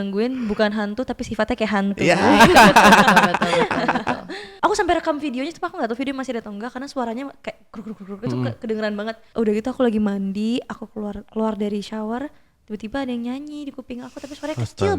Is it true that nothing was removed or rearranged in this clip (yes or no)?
no